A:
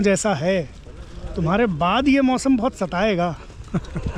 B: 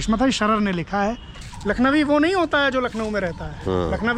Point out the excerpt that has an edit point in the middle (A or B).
B